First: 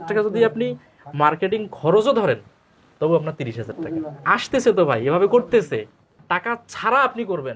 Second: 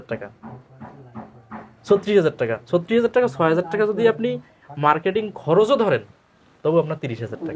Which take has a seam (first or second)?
first